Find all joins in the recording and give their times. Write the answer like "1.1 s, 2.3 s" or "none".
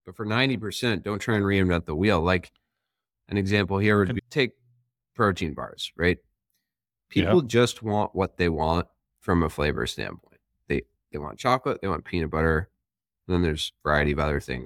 4.1 s

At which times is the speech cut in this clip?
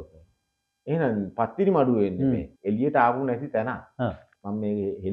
2.5 s

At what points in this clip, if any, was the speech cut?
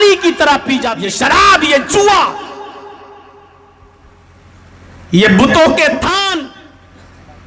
1.1 s, 6.4 s

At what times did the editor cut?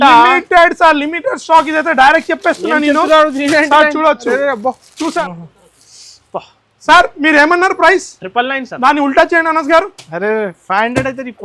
5.1 s

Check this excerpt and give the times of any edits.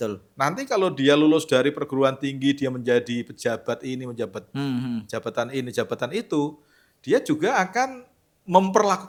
none

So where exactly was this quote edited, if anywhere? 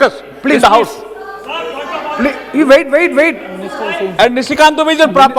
none

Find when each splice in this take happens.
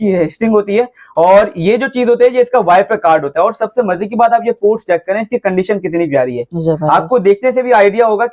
none

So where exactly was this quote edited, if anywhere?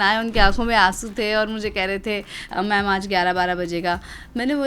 2.4 s

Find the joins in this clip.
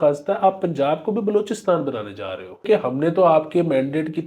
2.7 s

